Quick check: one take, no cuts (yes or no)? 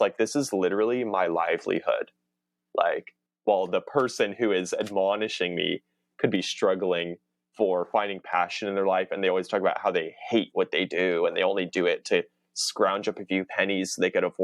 no